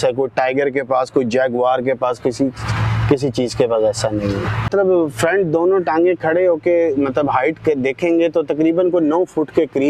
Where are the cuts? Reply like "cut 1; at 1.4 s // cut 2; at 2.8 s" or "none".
cut 1; at 4.7 s